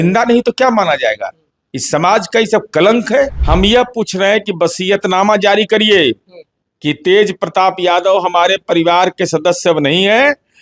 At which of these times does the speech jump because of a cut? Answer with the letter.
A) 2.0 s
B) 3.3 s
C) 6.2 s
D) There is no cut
B